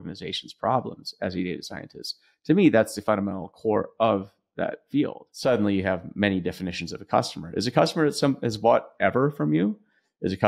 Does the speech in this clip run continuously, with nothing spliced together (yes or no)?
no